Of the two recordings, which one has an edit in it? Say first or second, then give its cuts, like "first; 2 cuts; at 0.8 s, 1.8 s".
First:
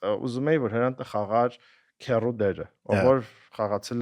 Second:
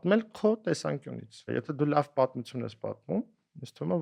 second; 1 cut; at 1.5 s